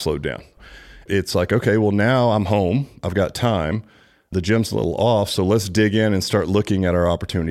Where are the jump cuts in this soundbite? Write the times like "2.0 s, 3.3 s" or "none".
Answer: 1.0 s, 4.3 s